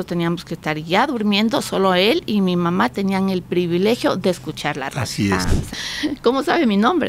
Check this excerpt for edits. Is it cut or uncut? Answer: cut